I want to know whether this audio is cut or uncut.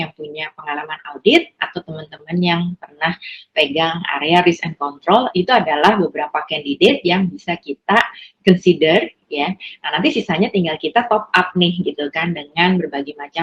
uncut